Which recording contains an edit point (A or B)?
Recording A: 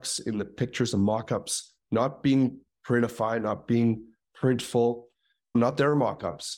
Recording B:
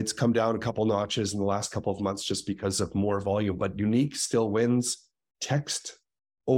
A